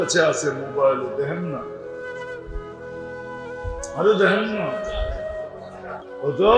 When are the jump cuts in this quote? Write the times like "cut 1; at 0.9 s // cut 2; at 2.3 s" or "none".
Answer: none